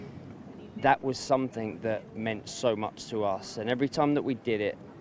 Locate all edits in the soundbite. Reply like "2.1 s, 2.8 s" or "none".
none

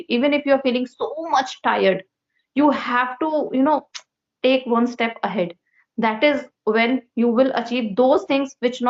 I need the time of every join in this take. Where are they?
none

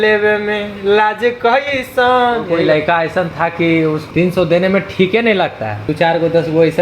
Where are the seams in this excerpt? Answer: 2.6 s, 4.0 s, 5.9 s

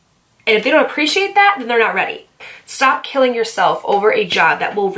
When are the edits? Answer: 2.5 s

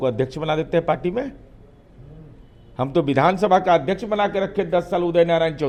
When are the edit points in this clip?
none

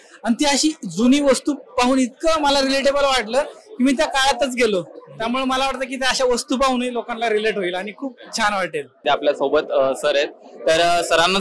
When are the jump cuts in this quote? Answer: none

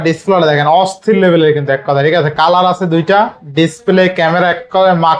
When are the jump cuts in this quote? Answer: none

